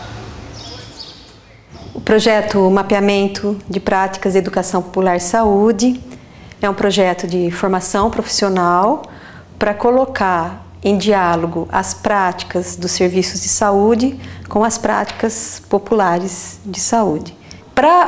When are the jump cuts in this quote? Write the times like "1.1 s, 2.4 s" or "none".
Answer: 1.7 s